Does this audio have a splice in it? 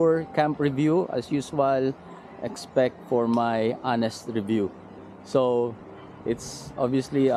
no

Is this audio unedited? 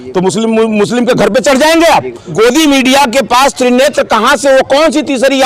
no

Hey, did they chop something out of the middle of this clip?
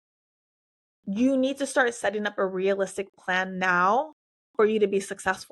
no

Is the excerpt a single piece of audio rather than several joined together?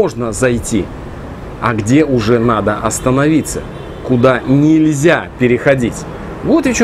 yes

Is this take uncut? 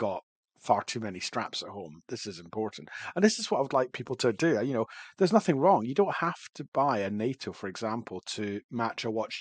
yes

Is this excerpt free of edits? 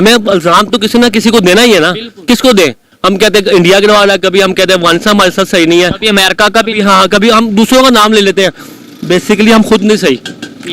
yes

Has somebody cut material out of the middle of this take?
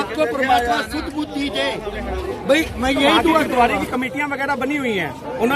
yes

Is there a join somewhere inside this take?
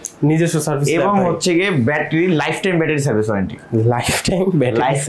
no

